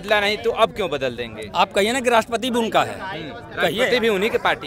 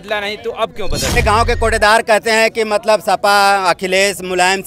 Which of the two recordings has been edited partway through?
second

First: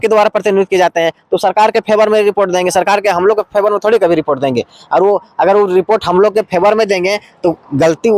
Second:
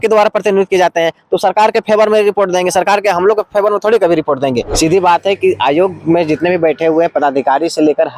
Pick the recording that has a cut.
second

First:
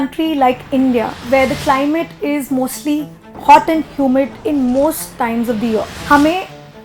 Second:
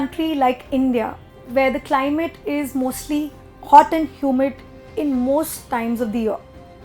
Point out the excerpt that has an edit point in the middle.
first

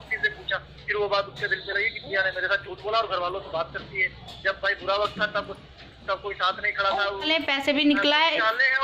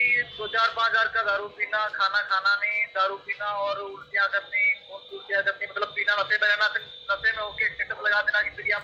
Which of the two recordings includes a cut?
first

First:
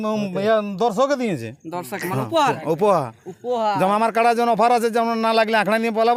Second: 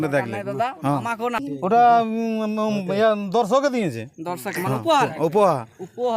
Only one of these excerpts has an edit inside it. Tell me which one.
second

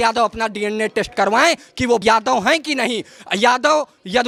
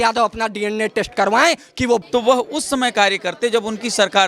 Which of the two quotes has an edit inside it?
second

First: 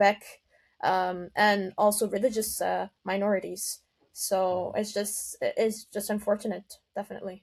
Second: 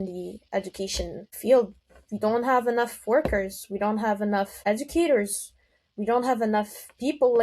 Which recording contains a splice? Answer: second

